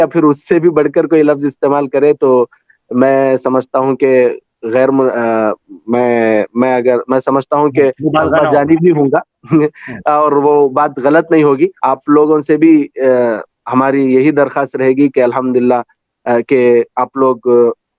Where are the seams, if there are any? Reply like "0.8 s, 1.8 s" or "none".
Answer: 11.8 s